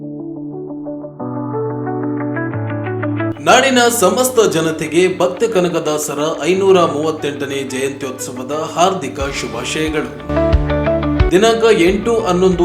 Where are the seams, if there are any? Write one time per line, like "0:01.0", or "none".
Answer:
none